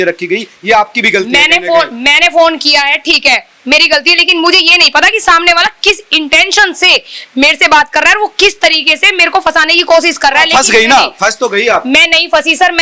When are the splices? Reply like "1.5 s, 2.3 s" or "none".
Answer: none